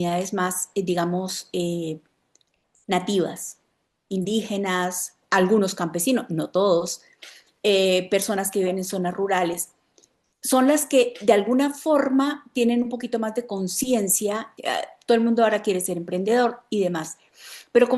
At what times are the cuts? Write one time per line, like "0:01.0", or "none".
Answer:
0:14.5